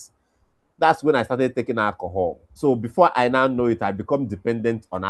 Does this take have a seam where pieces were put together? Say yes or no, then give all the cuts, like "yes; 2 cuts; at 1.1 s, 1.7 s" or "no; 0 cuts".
yes; 1 cut; at 2.5 s